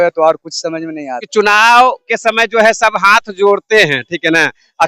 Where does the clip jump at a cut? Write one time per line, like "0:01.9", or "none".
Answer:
0:01.3